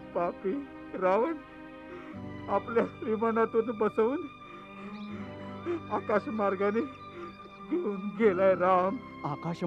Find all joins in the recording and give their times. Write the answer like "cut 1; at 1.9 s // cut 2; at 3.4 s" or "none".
none